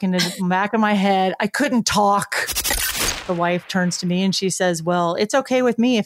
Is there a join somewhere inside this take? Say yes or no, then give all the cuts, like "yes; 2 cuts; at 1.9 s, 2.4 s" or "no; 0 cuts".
yes; 1 cut; at 2.8 s